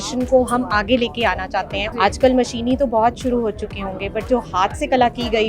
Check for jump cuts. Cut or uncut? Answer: cut